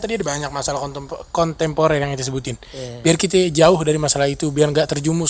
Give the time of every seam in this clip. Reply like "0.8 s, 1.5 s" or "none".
none